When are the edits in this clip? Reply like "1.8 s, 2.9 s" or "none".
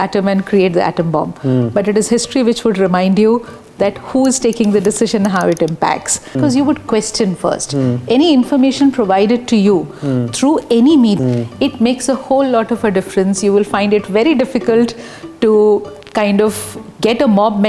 6.4 s, 11.2 s